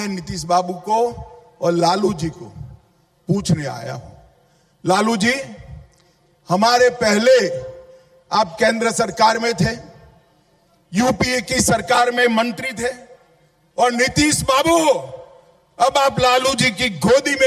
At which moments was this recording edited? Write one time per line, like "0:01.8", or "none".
none